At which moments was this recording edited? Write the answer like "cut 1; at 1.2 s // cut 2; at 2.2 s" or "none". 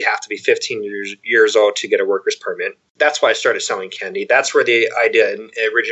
none